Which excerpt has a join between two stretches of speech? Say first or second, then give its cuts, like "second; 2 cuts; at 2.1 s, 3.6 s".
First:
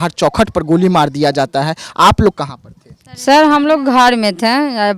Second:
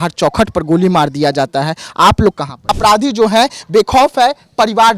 second; 1 cut; at 2.6 s